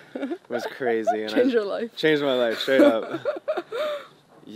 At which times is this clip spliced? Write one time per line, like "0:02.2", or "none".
none